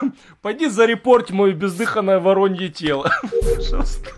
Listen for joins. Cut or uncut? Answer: cut